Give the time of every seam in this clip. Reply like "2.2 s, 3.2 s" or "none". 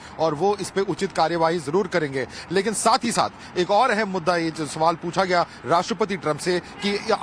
5.6 s